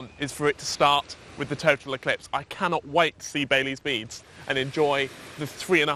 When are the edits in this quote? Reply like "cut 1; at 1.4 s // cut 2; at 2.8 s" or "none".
none